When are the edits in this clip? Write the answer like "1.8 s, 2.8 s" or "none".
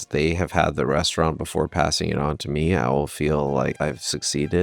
3.7 s